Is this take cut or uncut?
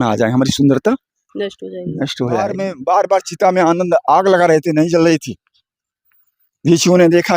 cut